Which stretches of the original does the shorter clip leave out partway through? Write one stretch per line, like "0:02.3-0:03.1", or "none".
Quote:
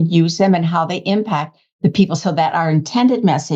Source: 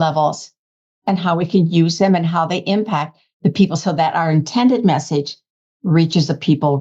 none

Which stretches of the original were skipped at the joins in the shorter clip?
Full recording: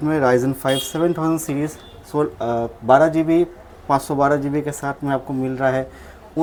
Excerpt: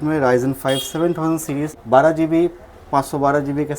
0:01.8-0:02.8

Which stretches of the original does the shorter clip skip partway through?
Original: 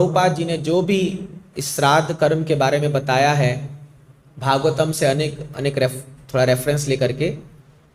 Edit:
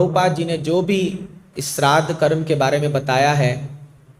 none

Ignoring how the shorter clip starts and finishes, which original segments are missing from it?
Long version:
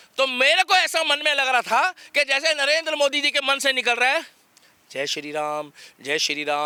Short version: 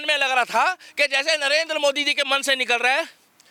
none

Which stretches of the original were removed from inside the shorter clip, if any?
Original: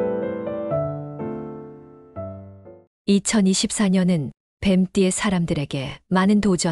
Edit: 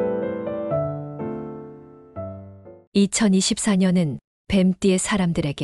0:02.7-0:02.8

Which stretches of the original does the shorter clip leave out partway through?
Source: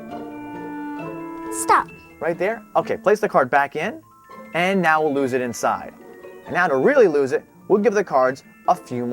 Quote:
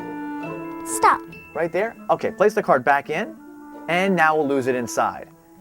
0:01.6-0:01.7

